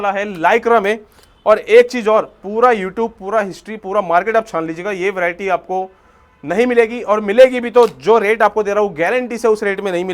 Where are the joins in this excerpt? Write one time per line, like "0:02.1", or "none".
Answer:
none